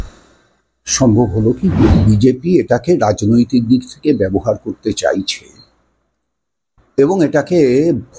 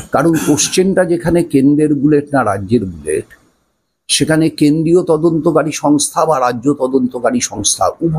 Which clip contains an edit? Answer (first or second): first